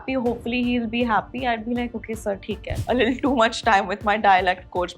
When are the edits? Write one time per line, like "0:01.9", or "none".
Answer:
0:02.7